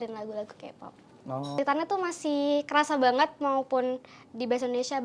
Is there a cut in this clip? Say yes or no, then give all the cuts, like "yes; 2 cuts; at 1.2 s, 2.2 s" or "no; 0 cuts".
yes; 1 cut; at 1.6 s